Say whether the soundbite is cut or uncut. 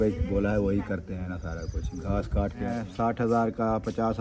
cut